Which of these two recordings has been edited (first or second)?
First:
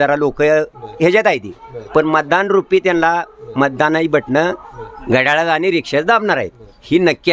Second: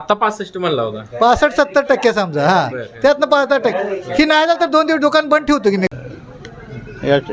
second